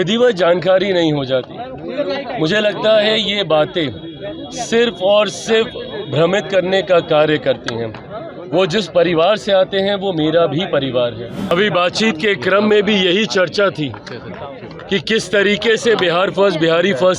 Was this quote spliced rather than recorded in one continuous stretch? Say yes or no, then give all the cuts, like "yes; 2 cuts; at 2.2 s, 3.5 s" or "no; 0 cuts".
yes; 1 cut; at 11.5 s